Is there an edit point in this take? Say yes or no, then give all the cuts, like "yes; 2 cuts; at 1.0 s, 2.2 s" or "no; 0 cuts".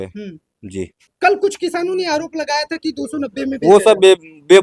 yes; 1 cut; at 1.0 s